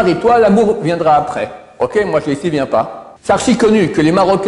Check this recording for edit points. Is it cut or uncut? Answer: cut